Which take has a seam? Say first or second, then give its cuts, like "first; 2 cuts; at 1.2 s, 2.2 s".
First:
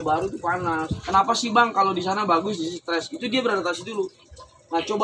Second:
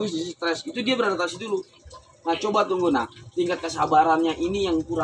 first; 1 cut; at 1.0 s